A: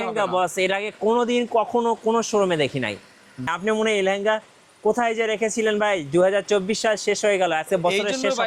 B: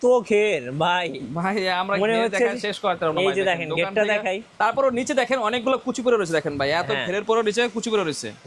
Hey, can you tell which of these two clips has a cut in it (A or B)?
A